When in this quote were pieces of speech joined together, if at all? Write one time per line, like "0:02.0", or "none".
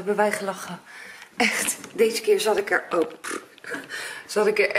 none